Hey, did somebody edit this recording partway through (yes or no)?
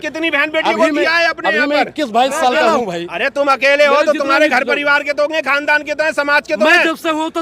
yes